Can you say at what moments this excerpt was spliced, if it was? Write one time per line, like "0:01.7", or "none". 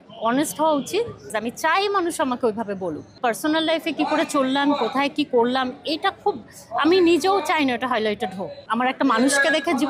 0:01.3
0:03.1
0:08.6

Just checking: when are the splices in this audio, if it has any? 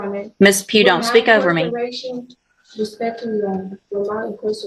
none

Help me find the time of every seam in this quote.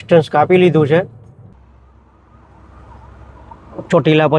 0:01.5

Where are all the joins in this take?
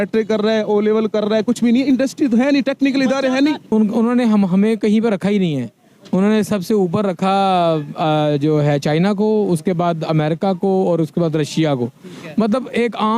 0:03.7

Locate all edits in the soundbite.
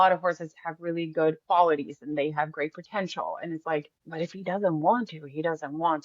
0:04.0

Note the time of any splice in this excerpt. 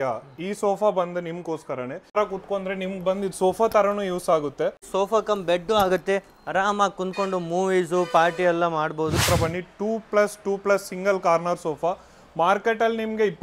0:04.9
0:09.2

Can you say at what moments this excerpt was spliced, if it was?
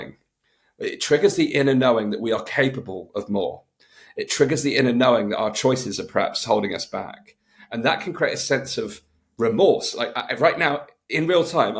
none

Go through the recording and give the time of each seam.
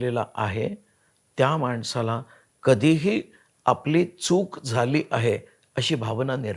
none

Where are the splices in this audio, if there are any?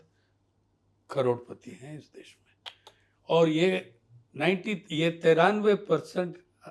none

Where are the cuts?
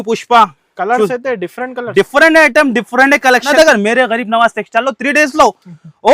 0:03.5

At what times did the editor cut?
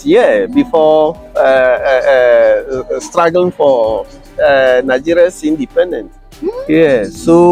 none

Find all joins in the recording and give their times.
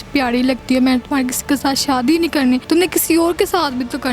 0:02.6

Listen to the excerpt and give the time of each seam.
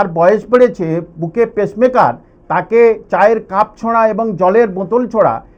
none

